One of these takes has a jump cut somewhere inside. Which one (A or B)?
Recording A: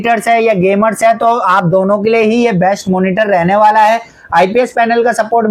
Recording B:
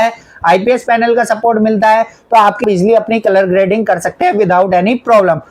B